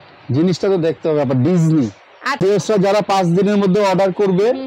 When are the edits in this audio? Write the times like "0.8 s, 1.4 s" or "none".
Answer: 2.4 s